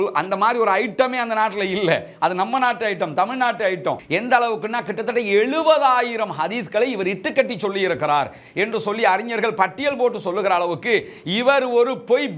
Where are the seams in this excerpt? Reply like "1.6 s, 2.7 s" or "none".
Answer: 4.0 s